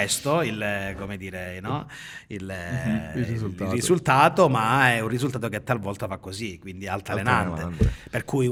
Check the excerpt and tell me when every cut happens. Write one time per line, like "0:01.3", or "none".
none